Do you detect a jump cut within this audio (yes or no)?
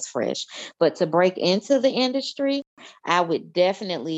no